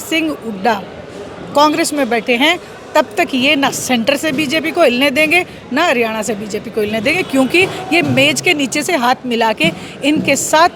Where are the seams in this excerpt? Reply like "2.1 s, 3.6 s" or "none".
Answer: none